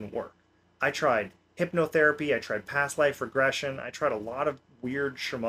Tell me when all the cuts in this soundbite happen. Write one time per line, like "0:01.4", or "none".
none